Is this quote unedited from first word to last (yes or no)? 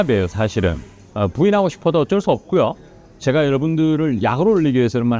yes